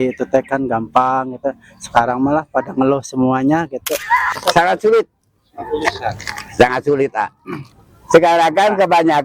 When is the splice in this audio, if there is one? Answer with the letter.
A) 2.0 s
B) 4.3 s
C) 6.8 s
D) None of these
B